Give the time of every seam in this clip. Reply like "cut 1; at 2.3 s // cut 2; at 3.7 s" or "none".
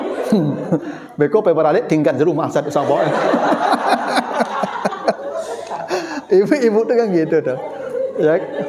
none